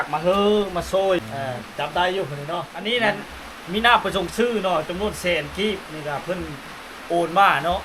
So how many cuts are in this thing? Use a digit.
2